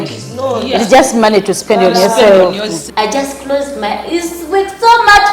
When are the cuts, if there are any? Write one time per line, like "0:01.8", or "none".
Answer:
0:02.8